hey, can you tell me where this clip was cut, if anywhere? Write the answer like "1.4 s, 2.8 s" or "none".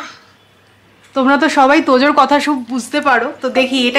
none